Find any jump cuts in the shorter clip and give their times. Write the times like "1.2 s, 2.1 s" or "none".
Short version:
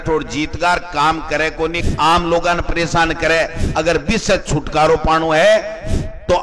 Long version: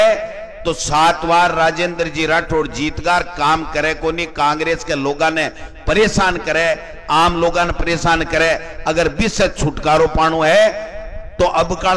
1.8 s